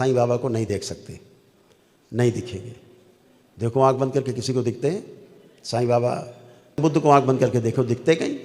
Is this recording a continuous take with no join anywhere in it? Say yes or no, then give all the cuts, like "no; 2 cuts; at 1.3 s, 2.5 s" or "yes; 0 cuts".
no; 1 cut; at 6.8 s